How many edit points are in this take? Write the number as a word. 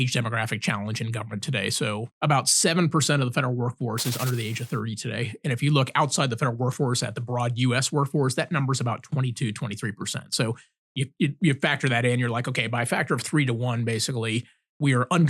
one